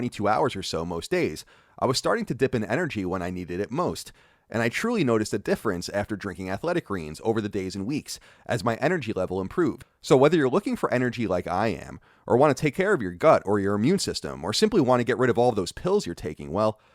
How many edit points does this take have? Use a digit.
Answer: 1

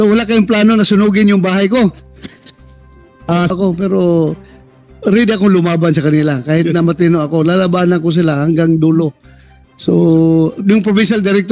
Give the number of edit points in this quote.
1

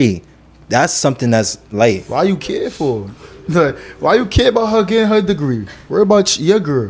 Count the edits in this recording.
0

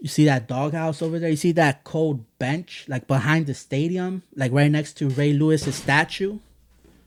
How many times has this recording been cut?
0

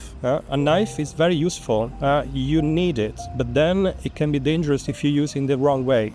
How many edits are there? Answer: 0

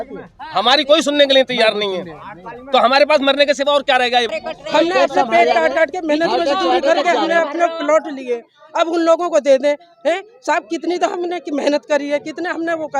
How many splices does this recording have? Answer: 1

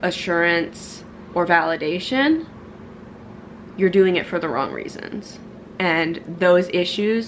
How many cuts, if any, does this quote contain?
0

